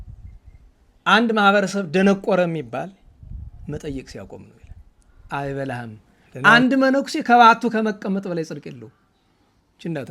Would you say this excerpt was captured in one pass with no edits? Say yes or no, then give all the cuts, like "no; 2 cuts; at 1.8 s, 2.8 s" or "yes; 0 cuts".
no; 1 cut; at 5.2 s